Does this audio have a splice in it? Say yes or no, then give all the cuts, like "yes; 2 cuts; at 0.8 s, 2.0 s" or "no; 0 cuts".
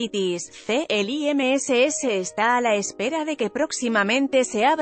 yes; 1 cut; at 1.0 s